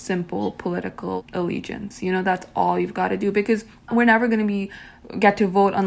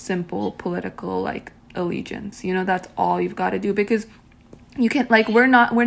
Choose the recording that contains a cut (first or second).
first